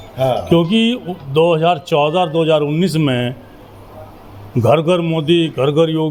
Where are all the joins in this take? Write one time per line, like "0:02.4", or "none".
none